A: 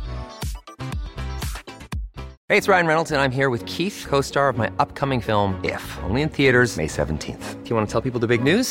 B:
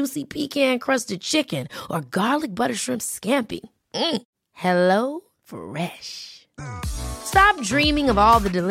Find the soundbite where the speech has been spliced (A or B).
A